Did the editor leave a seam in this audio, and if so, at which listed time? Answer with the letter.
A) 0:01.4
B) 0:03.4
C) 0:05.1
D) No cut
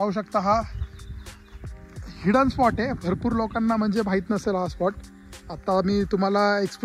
D